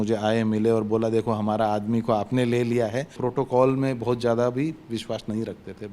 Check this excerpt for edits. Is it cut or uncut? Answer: cut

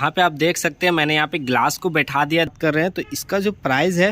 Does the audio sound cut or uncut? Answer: cut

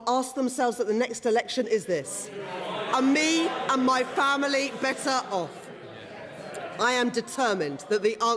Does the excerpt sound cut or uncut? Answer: uncut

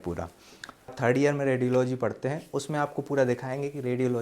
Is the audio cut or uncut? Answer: cut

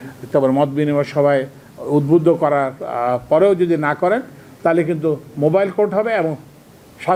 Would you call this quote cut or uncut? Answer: uncut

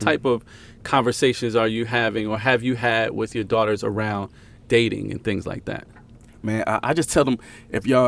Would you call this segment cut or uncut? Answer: uncut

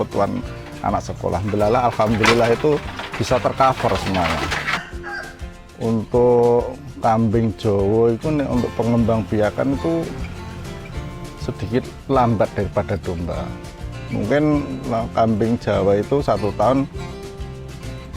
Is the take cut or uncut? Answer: cut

